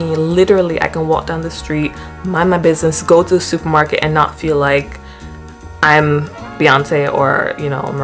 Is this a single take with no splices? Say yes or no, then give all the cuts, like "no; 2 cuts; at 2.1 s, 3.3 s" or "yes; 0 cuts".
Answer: yes; 0 cuts